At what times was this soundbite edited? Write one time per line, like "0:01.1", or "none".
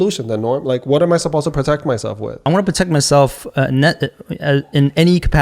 0:02.4